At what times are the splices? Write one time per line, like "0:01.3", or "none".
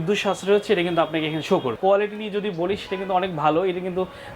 0:01.8